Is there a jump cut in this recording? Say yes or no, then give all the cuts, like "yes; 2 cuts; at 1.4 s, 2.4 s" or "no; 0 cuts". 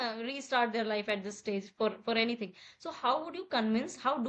no; 0 cuts